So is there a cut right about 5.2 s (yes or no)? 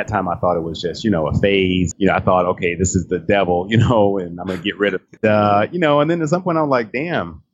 yes